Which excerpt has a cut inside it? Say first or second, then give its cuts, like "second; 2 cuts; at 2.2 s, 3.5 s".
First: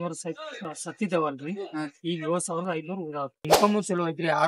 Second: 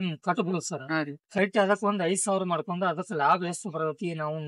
first; 1 cut; at 3.4 s